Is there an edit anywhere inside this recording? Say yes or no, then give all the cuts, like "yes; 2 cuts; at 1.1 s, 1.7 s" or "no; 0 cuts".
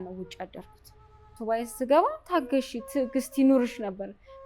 yes; 1 cut; at 1.3 s